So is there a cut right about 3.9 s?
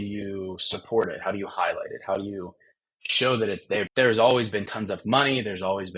yes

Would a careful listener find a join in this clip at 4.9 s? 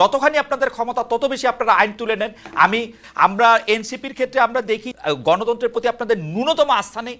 yes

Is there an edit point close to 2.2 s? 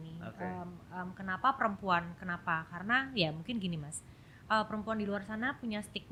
no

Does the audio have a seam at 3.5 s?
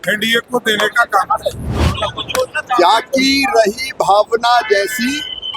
no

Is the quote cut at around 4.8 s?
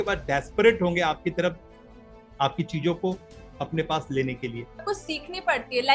yes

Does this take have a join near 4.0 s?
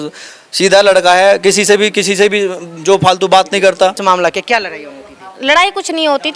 yes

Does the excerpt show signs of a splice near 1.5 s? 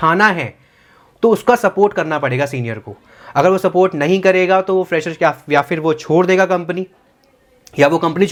no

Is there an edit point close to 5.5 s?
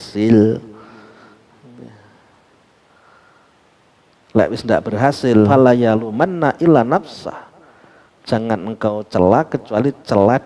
yes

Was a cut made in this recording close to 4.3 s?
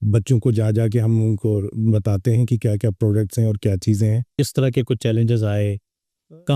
yes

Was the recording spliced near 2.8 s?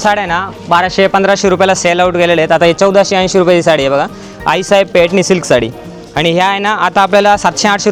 no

